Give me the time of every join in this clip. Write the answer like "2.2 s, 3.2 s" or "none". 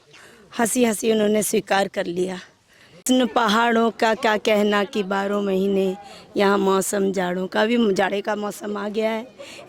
3.0 s